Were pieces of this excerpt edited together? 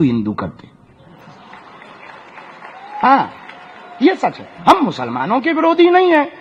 no; 0 cuts

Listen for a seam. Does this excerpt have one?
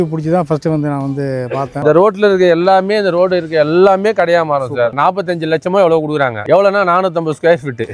yes; 3 cuts; at 1.7 s, 4.9 s, 6.4 s

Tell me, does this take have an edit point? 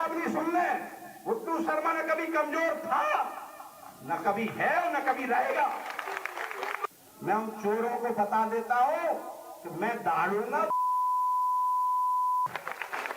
yes; 1 cut; at 6.8 s

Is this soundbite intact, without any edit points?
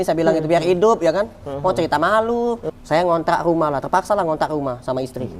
no; 1 cut; at 2.6 s

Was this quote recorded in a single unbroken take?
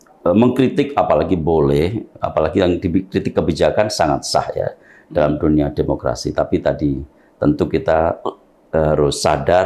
yes; 0 cuts

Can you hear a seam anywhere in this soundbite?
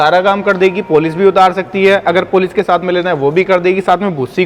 no; 0 cuts

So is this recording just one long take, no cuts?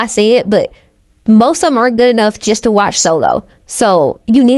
yes; 0 cuts

